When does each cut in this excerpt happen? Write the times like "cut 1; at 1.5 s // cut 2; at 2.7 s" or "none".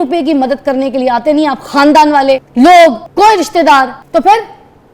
cut 1; at 2.5 s // cut 2; at 3.0 s // cut 3; at 4.0 s